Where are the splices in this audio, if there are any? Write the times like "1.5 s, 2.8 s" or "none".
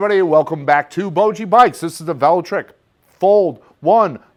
none